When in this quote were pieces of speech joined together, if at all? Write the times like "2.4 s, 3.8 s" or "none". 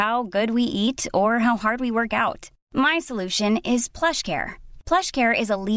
none